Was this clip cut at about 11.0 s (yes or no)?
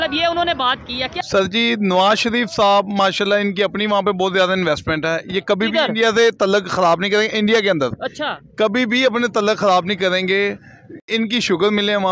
yes